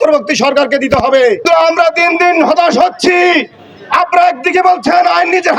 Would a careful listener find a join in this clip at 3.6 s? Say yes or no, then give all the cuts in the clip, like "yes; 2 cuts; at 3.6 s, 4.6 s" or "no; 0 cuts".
no; 1 cut; at 1.5 s